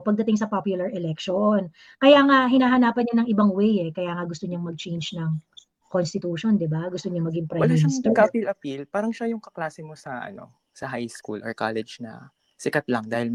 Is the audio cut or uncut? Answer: uncut